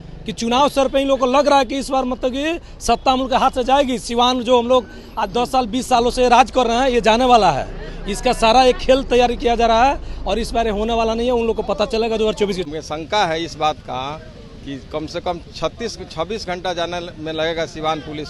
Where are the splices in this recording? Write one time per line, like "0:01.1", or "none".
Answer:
0:12.7